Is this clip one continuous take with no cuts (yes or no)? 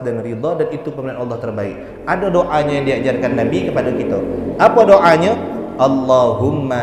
yes